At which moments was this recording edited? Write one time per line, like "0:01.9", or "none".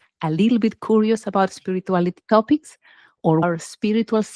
0:03.4